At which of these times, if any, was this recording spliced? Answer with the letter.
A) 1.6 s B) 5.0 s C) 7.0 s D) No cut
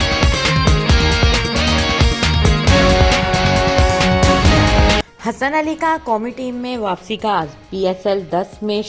D